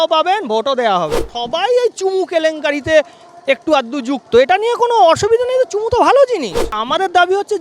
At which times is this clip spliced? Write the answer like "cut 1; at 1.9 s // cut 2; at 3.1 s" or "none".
cut 1; at 1.3 s // cut 2; at 6.8 s